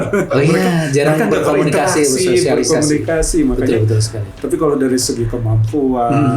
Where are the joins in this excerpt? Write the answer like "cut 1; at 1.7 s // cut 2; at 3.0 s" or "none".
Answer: cut 1; at 4.2 s